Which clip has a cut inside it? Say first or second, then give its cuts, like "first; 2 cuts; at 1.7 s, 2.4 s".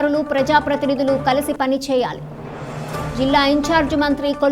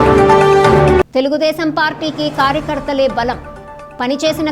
second; 1 cut; at 1.0 s